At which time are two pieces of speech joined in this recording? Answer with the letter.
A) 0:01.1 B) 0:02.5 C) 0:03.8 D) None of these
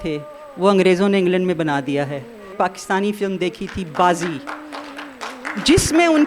B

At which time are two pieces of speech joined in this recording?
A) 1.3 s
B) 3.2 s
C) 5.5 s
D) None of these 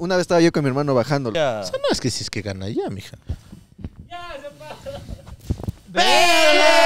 A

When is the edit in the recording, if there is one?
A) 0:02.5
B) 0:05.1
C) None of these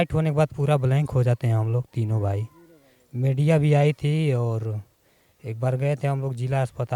C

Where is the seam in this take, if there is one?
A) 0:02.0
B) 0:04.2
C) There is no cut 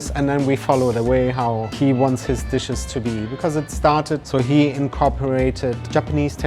B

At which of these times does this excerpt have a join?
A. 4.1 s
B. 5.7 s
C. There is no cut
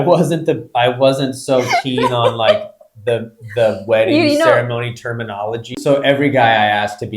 B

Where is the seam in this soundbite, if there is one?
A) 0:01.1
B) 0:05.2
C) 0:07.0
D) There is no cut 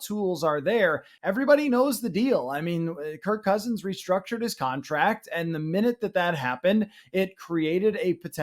A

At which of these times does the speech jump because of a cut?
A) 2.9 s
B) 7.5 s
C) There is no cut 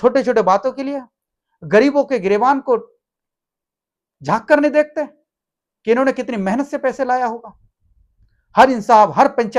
C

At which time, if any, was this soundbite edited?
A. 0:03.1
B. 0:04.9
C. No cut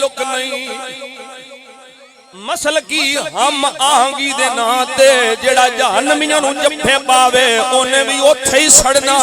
C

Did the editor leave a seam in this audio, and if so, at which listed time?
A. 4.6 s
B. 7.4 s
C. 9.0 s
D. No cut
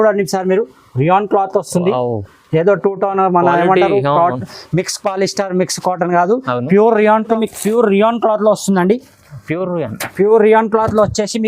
B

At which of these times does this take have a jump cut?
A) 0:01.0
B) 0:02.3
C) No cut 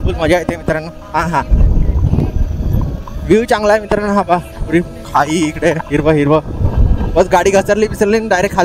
C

